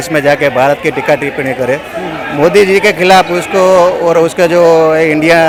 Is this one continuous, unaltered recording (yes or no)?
yes